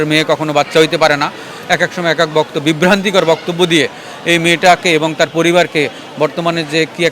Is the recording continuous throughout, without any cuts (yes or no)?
yes